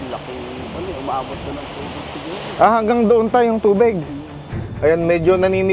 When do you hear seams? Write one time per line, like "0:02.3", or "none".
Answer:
0:04.5